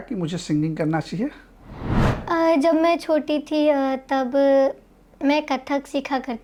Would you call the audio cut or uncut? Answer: uncut